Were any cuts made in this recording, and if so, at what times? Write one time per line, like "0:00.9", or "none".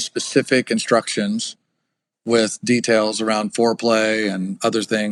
none